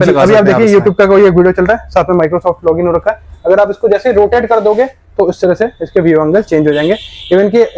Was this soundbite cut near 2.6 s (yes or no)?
no